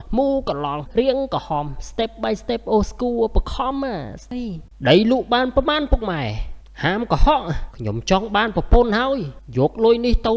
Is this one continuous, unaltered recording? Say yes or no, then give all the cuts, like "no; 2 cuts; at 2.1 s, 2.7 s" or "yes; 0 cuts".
no; 1 cut; at 4.3 s